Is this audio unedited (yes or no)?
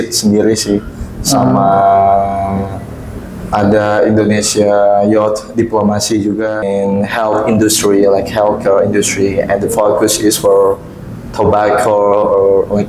no